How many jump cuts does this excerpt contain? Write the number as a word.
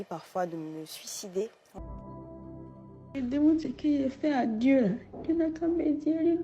one